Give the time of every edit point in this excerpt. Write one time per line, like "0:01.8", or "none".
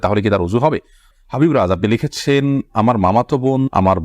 0:01.1